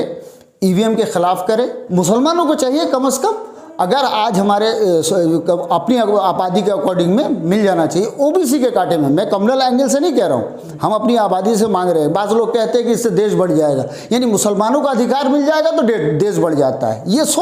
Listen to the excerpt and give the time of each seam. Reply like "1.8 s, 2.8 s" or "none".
1.8 s